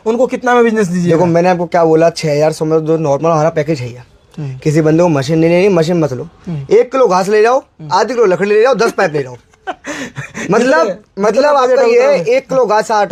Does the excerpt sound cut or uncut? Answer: uncut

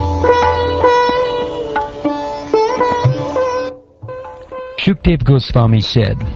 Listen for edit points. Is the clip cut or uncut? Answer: cut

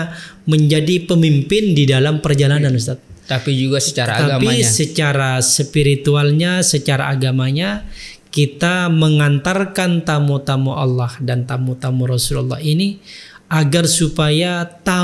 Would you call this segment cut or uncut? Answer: uncut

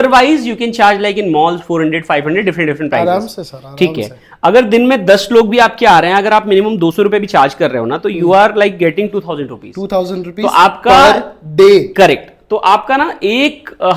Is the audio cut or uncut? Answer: uncut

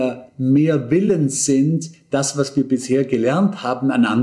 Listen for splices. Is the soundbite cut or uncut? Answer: uncut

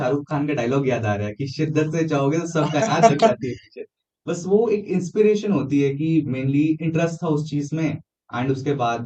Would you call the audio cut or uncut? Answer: uncut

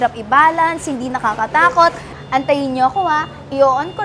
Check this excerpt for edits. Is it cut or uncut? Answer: cut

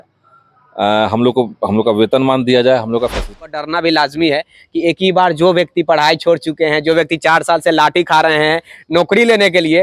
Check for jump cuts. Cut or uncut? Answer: cut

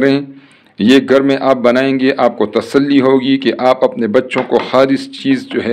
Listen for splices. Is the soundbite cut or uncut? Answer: uncut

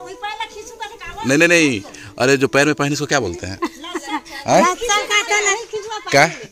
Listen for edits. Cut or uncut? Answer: uncut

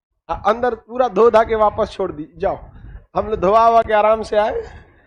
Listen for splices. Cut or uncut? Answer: uncut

